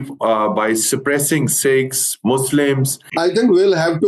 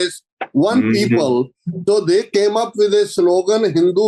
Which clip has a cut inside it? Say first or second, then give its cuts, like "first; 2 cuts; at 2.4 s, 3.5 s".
first; 1 cut; at 3.0 s